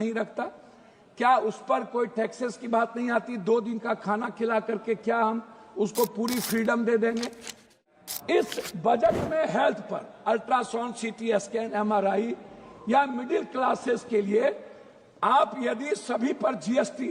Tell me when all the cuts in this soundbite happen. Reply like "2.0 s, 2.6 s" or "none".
7.8 s